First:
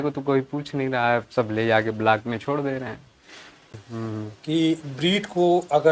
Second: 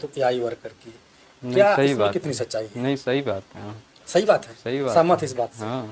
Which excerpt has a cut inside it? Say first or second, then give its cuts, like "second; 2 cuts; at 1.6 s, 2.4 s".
first; 1 cut; at 3.7 s